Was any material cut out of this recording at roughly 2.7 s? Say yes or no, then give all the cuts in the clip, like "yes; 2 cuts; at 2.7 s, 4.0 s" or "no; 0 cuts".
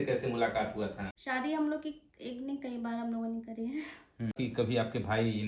no; 2 cuts; at 1.2 s, 4.4 s